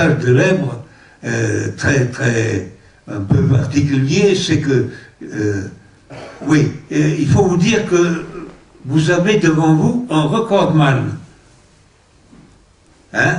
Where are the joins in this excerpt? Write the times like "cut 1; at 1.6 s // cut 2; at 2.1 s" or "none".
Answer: none